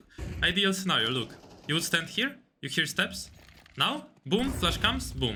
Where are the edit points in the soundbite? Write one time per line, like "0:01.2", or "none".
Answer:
none